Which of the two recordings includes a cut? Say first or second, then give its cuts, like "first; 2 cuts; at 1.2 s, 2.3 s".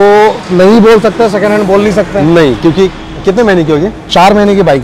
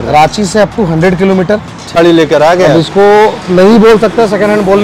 second; 1 cut; at 2.0 s